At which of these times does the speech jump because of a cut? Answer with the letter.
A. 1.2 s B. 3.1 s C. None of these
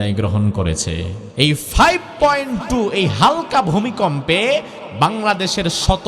A